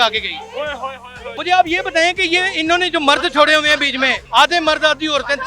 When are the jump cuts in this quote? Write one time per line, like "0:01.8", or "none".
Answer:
0:01.3
0:04.2